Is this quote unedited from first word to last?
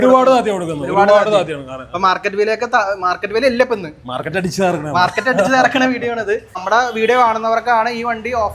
no; 1 cut; at 6.6 s

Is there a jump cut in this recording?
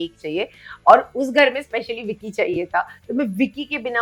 no; 0 cuts

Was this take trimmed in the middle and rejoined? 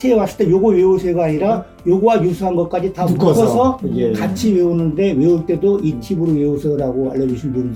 no; 0 cuts

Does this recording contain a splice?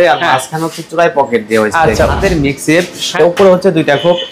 yes; 2 cuts; at 2.1 s, 3.1 s

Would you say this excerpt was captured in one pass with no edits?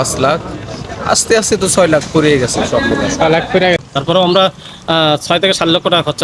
no; 1 cut; at 3.8 s

